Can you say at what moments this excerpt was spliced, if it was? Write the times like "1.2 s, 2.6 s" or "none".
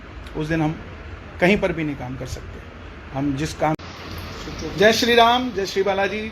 3.8 s